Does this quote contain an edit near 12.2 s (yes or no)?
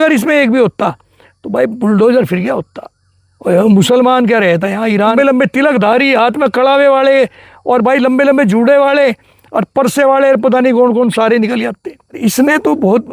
yes